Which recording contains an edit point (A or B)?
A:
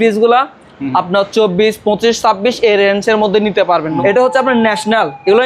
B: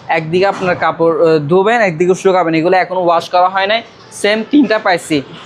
A